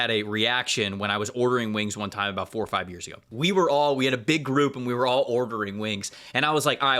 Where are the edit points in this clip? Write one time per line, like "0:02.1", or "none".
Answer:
0:03.3